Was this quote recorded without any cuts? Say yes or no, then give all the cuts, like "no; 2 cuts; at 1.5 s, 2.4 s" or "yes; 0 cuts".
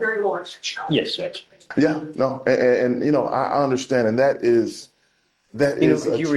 no; 1 cut; at 1.6 s